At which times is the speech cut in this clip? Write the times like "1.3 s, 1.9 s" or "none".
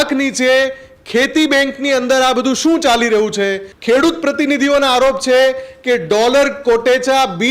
3.7 s